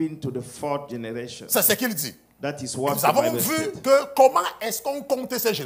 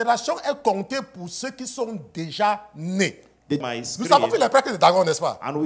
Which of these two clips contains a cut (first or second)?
second